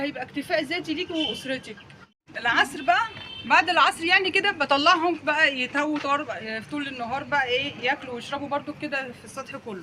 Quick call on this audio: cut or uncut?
cut